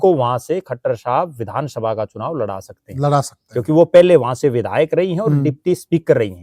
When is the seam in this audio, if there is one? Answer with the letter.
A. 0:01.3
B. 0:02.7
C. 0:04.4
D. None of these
D